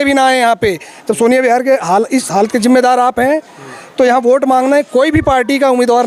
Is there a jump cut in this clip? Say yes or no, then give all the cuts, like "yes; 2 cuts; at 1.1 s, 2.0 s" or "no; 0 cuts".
no; 0 cuts